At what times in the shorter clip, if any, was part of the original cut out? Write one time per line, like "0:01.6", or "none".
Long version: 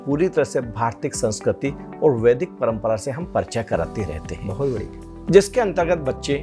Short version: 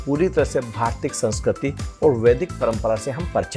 none